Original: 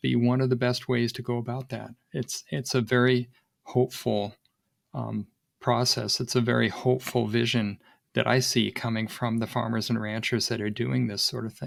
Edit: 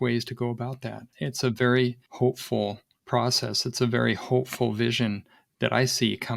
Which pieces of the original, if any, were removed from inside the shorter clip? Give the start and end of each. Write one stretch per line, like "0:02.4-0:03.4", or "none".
0:02.0-0:02.4
0:03.4-0:03.6
0:04.4-0:05.4